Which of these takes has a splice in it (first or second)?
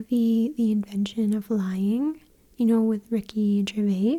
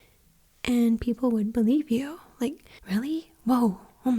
second